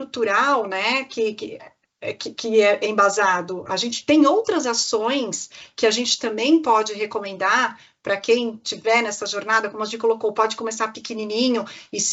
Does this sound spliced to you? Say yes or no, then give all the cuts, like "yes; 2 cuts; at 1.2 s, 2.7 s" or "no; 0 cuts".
no; 0 cuts